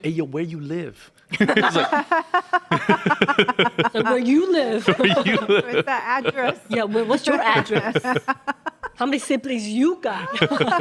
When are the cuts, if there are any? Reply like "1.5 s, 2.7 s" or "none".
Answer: none